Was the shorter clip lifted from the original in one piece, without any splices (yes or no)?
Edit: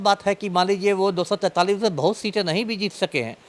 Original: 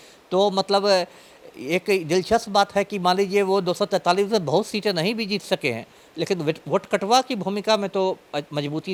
yes